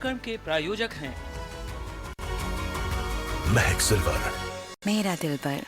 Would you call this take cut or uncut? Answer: cut